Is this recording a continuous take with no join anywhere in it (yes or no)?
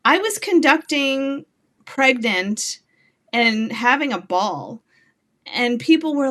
yes